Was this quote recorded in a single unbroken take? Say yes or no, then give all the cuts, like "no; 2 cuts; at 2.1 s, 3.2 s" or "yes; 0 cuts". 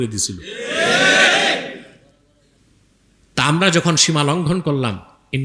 no; 1 cut; at 2.6 s